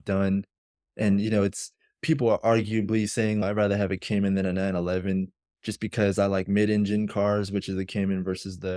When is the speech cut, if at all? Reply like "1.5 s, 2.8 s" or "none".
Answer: none

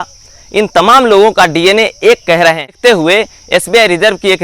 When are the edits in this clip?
2.8 s

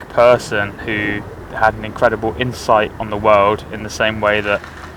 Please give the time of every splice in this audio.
none

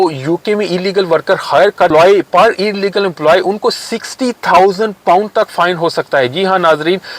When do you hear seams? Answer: 1.9 s

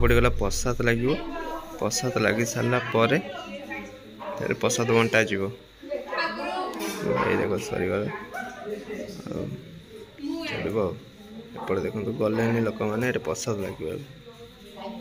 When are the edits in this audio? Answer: none

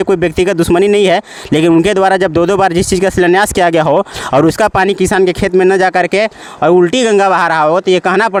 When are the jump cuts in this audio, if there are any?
none

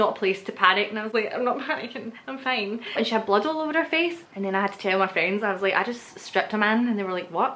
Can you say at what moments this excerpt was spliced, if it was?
3.0 s, 4.3 s

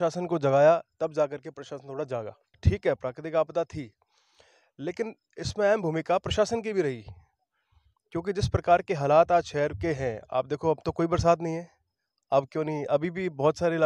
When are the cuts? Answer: 2.5 s

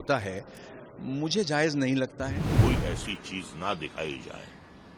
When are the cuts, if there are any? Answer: 2.5 s

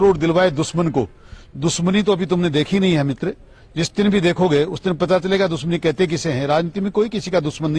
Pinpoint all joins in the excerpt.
none

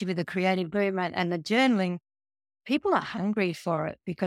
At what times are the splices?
none

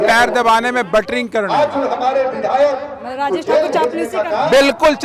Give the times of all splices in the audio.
none

